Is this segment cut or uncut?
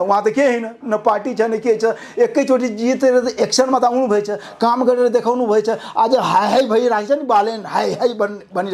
uncut